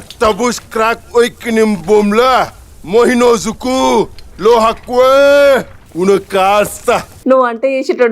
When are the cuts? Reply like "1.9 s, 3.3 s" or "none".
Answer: 7.1 s